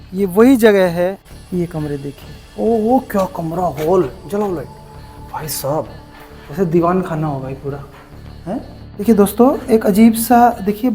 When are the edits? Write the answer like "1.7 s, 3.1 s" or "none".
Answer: 1.3 s, 9.0 s